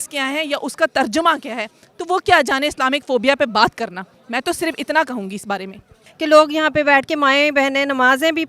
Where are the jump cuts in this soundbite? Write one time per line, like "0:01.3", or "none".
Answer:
0:06.0

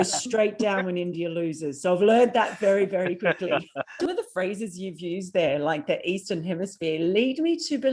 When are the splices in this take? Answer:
0:04.0

